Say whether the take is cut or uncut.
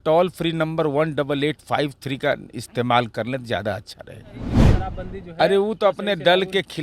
cut